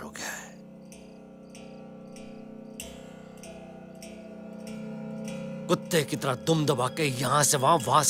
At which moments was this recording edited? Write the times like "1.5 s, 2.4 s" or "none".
none